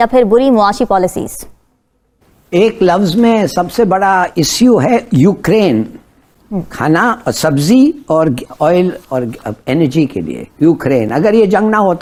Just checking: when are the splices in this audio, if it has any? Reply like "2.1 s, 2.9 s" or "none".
none